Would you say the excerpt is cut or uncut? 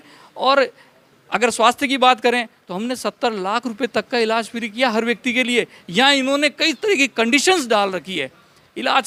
uncut